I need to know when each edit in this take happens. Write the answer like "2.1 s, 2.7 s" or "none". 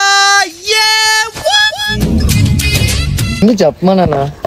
3.4 s

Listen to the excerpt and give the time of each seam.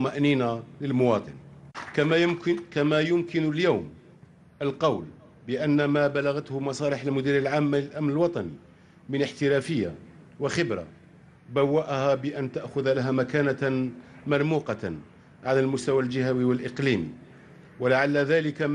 15.4 s

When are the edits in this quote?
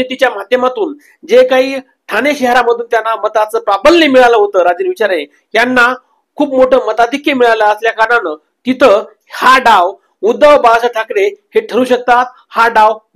none

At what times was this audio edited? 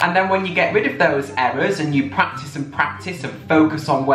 none

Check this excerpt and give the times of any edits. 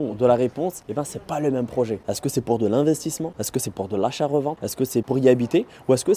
none

